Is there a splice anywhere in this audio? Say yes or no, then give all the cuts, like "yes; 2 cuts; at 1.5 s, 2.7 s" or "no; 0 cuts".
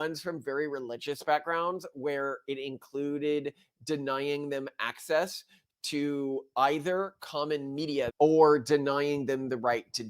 yes; 1 cut; at 8.1 s